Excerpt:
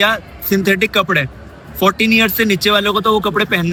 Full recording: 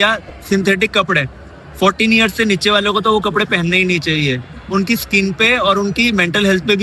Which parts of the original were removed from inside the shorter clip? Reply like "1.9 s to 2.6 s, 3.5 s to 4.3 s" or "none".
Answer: none